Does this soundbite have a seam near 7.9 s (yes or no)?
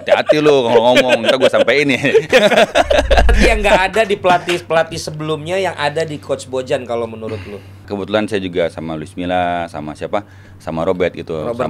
yes